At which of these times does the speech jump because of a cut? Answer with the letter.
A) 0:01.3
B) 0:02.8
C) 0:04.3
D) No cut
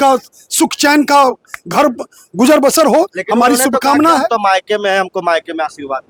D